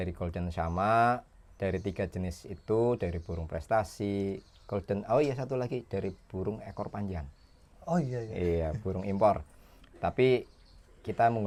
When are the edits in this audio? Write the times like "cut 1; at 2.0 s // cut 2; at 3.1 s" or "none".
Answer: none